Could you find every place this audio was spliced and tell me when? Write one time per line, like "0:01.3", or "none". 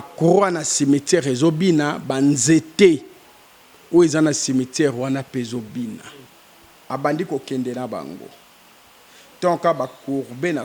0:06.3